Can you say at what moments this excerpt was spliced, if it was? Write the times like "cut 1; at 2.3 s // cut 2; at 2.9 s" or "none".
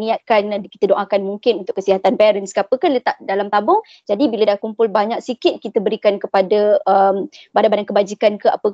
none